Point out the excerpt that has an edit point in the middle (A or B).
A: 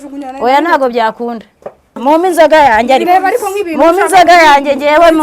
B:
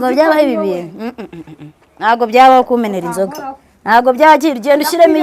A